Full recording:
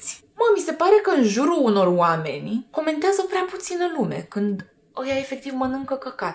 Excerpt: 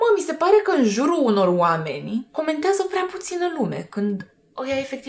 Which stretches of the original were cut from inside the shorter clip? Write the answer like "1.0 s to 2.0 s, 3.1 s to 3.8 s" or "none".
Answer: none